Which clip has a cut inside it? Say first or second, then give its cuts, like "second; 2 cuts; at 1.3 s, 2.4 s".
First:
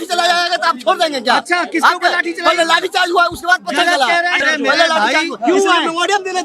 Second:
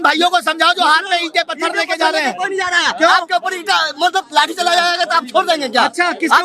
first; 1 cut; at 4.4 s